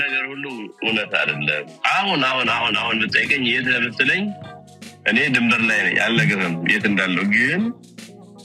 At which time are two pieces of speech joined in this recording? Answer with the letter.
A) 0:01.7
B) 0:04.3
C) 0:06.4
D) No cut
A